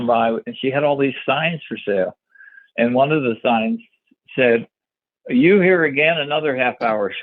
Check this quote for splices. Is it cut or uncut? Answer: uncut